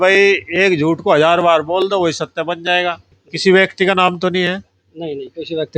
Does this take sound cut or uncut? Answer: cut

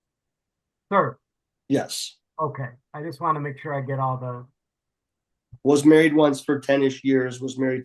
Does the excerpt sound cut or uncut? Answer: uncut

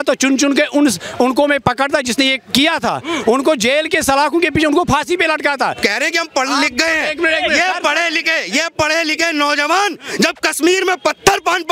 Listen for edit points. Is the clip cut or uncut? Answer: cut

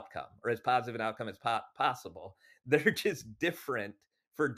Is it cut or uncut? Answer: uncut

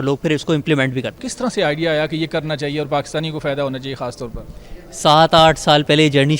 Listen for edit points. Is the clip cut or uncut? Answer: uncut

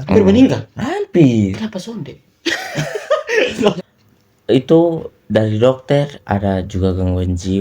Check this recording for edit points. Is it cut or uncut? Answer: cut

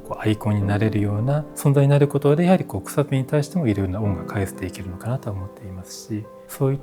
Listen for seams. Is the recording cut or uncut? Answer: uncut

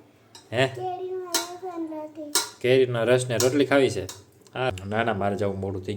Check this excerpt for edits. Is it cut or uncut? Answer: cut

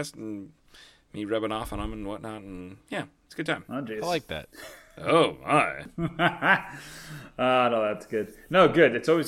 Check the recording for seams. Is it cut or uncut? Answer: cut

